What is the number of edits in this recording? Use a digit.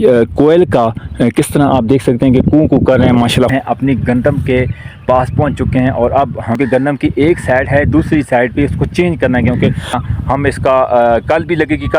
2